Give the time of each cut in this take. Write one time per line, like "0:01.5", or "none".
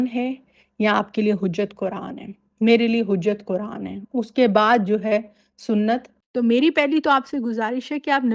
0:06.1